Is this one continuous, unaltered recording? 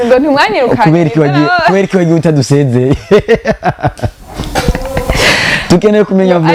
yes; 0 cuts

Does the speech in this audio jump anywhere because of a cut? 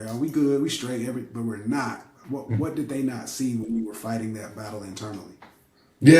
no; 0 cuts

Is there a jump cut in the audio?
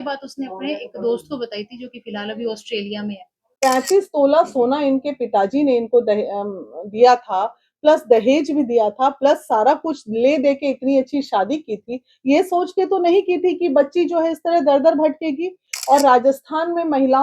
yes; 1 cut; at 3.5 s

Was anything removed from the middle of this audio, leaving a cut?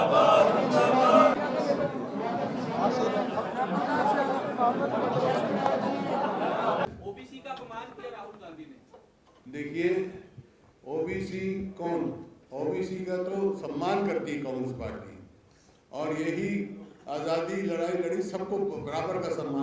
yes; 2 cuts; at 1.3 s, 6.8 s

